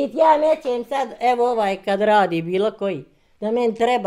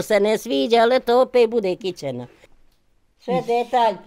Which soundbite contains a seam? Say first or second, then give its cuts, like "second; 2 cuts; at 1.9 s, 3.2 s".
second; 1 cut; at 2.4 s